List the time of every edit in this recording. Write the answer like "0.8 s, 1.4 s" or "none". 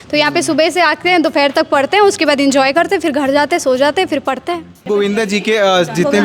4.8 s